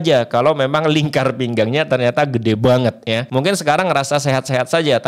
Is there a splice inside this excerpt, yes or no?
yes